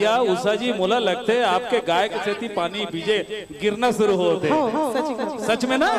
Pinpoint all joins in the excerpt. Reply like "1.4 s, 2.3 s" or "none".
none

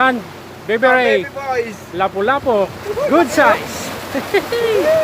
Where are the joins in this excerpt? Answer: none

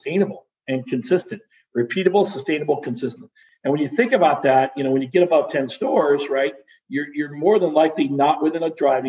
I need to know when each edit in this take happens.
3.4 s

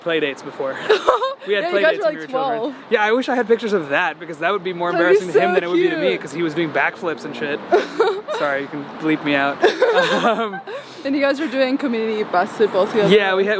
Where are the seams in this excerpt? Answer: none

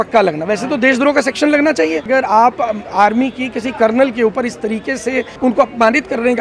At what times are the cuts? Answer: 2.1 s, 5.3 s

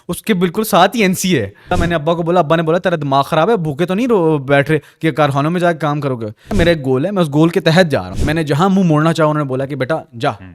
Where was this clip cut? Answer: 1.8 s, 6.5 s, 8.1 s

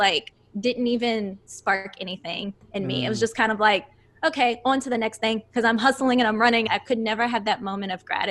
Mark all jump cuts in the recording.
6.7 s

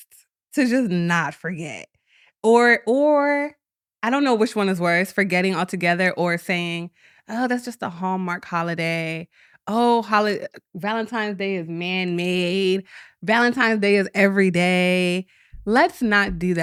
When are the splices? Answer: none

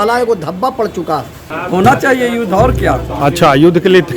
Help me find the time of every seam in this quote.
1.5 s

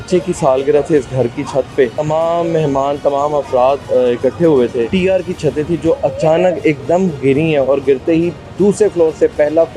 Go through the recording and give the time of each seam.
2.0 s, 4.9 s

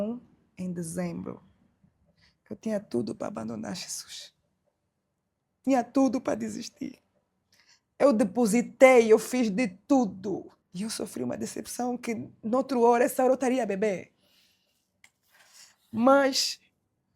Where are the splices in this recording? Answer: 10.6 s

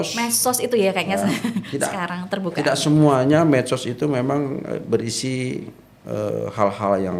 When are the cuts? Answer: none

